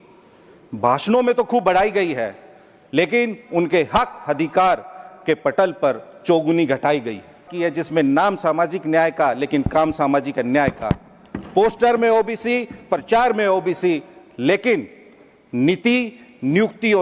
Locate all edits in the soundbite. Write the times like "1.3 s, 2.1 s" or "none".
7.5 s